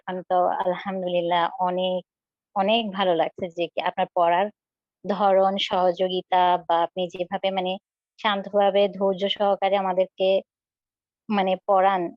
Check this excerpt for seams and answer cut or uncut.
uncut